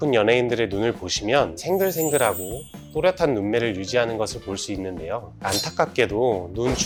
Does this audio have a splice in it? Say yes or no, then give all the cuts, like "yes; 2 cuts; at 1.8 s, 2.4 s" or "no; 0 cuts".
no; 0 cuts